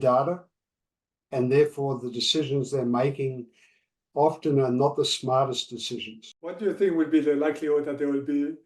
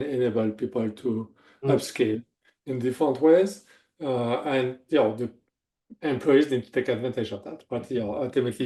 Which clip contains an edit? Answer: first; 1 cut; at 6.6 s

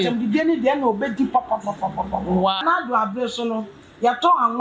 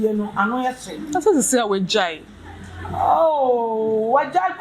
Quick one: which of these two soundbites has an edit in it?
first; 1 cut; at 2.6 s

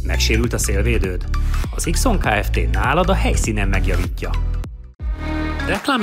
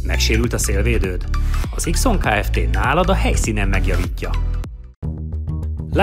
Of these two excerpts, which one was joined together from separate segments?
first; 1 cut; at 4.9 s

